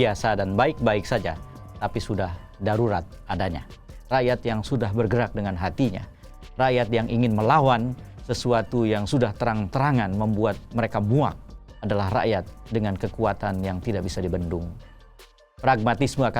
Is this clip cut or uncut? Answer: cut